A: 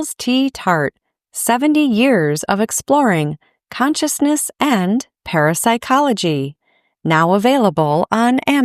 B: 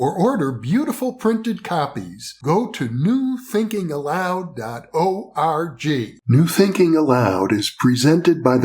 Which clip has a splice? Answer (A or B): B